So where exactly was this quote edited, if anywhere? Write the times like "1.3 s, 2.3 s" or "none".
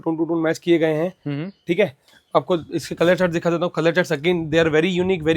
none